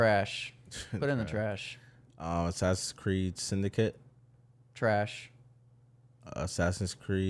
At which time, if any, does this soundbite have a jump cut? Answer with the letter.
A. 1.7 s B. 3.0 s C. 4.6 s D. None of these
D